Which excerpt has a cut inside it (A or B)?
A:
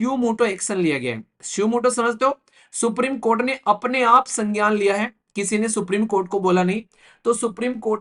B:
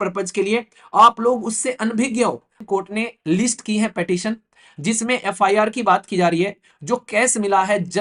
B